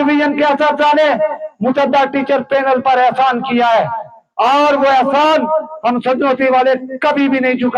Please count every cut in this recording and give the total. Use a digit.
0